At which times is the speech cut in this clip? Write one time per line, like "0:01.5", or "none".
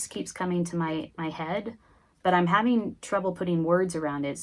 none